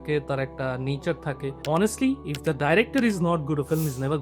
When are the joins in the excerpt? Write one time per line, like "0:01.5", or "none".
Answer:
0:01.5